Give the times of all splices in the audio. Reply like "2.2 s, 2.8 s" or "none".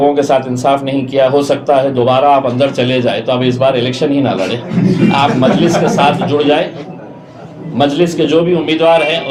none